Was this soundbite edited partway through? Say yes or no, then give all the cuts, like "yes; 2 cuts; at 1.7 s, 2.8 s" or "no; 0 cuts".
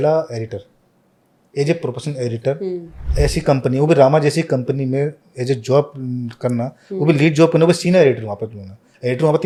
no; 0 cuts